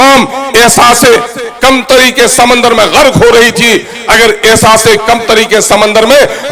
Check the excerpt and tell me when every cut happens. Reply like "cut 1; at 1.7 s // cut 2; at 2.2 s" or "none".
none